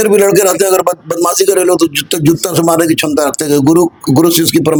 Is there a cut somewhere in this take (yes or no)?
no